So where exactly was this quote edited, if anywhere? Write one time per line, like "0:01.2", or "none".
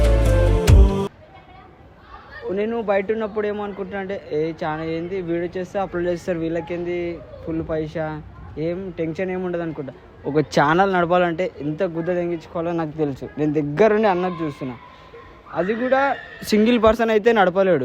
none

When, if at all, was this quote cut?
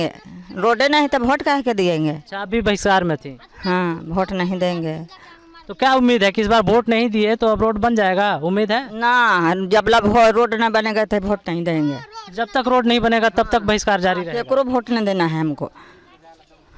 none

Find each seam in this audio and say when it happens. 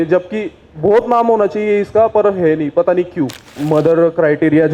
0:03.6

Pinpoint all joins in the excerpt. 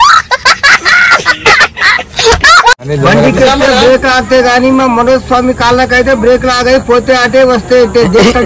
0:02.8

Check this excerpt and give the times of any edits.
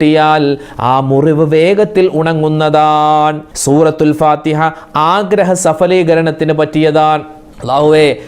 0:03.5

